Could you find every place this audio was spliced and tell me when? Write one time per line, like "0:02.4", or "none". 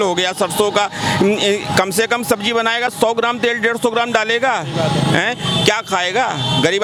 none